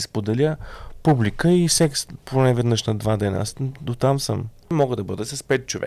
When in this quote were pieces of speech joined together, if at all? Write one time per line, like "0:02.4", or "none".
0:04.7

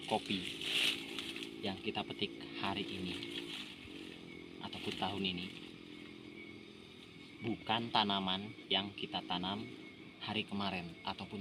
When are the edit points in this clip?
none

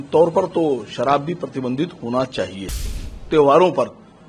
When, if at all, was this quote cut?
0:02.9

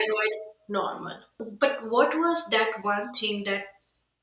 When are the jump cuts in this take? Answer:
0:01.5

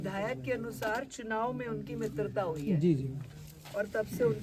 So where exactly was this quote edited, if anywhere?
none

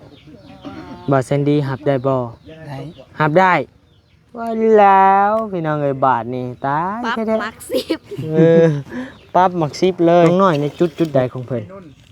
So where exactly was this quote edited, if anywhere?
0:10.3

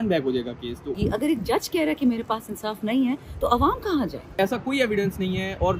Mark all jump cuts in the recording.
0:01.0
0:04.3

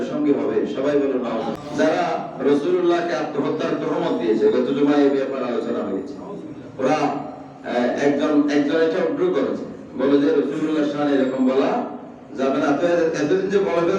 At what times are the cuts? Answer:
0:01.5

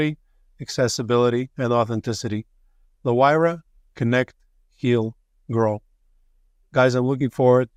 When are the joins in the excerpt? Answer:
none

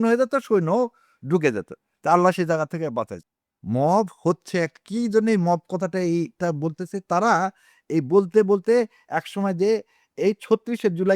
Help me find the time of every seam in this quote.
0:03.2

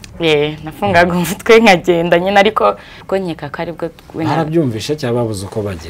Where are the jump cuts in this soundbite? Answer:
0:02.9

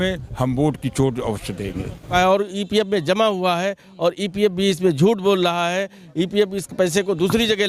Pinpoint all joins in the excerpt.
0:02.1

